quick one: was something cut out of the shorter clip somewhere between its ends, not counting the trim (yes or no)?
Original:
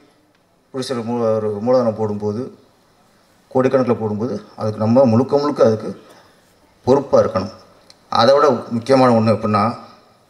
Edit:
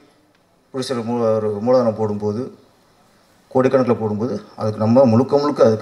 no